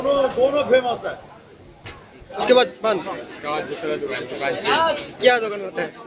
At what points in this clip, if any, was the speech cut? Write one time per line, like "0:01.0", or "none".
0:02.3